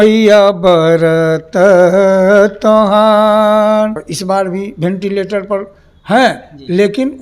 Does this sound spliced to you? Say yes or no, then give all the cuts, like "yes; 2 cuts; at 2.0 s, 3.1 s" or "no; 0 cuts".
yes; 1 cut; at 4.0 s